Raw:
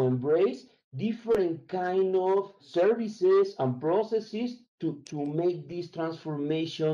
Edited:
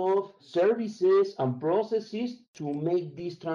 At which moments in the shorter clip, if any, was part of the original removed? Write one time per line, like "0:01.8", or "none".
0:02.5